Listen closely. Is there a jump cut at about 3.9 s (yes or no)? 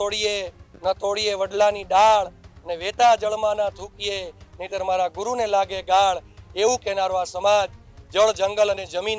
no